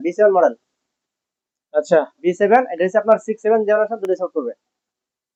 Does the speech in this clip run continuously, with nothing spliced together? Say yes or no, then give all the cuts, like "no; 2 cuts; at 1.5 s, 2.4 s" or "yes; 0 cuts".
yes; 0 cuts